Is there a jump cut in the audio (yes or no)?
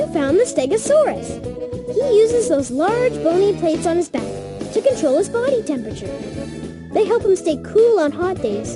no